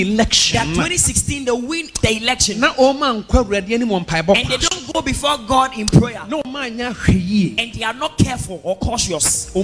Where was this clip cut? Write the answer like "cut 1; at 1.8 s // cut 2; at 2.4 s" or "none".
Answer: cut 1; at 1.9 s